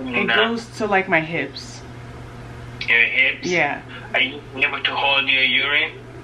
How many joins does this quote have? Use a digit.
0